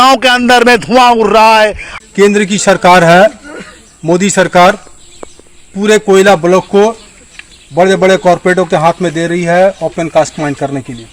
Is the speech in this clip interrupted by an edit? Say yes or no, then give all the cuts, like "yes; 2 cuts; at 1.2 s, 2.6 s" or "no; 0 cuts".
yes; 1 cut; at 1.9 s